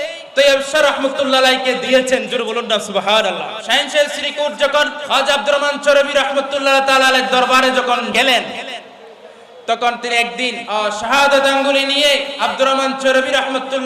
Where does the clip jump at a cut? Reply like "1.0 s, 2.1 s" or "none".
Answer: 3.6 s, 5.0 s, 8.1 s, 10.6 s, 12.3 s